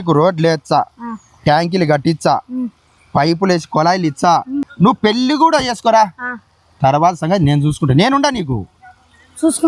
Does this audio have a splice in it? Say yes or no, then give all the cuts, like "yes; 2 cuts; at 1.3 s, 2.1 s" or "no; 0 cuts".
yes; 1 cut; at 4.7 s